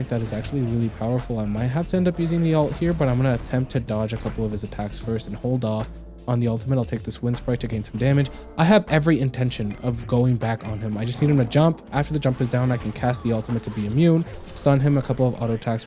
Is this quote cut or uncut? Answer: uncut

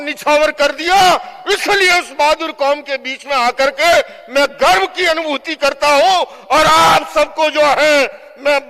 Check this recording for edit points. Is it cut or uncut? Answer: uncut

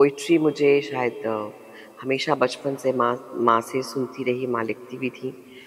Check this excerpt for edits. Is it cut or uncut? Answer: uncut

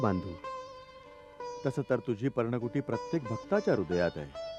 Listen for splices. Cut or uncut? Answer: uncut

